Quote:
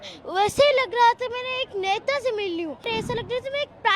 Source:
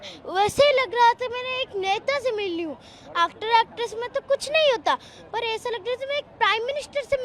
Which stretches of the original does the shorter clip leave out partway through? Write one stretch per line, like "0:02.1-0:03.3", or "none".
0:02.8-0:05.4

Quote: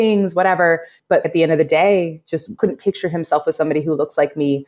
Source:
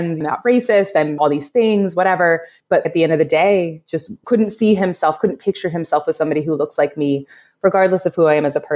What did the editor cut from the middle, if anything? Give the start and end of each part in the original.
0:04.2-0:05.2

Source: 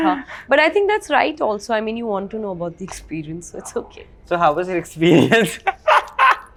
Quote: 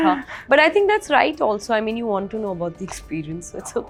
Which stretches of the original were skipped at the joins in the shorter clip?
none

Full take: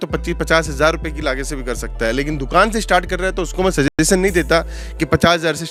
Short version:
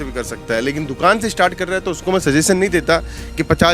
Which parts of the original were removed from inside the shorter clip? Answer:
0:03.9-0:04.0

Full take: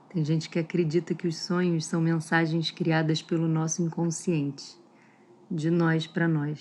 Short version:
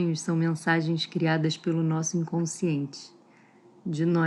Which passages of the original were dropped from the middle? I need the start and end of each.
none

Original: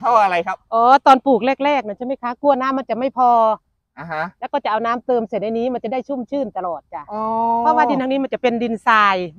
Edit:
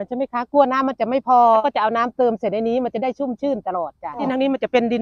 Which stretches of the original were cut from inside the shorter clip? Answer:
0:03.5-0:04.5
0:07.1-0:07.9

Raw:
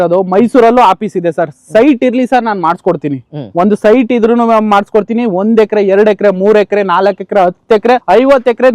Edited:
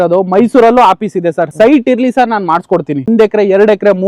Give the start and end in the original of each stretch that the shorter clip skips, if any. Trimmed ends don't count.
0:01.5-0:01.6
0:03.2-0:05.4

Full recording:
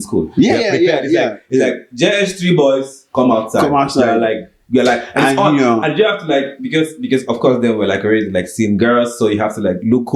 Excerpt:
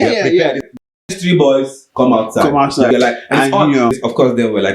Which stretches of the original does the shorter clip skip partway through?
0:01.5-0:02.2
0:04.1-0:04.7
0:05.8-0:07.2

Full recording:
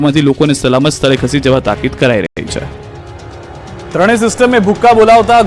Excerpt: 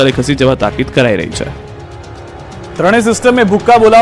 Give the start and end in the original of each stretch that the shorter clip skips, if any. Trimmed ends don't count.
0:02.3-0:02.4

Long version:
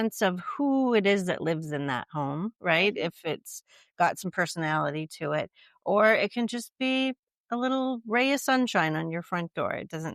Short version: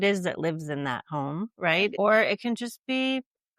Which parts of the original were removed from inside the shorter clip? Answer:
0:03.0-0:05.9

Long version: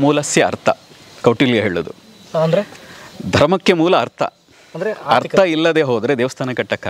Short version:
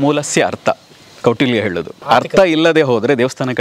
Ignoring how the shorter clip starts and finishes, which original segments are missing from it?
0:02.0-0:05.0

